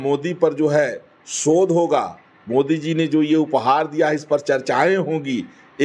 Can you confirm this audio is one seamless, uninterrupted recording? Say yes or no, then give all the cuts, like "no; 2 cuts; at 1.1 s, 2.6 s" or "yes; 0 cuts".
yes; 0 cuts